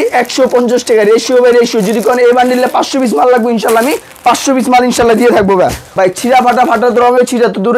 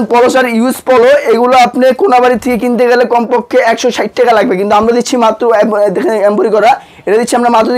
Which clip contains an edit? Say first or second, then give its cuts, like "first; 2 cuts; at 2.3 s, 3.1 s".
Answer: first; 1 cut; at 5.9 s